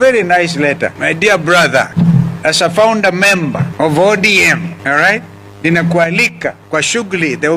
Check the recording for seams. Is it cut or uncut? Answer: cut